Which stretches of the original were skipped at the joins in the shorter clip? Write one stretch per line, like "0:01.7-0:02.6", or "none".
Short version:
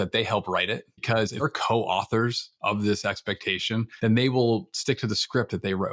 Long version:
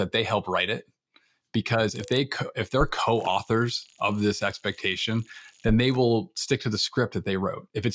0:01.4-0:02.8
0:05.3-0:05.5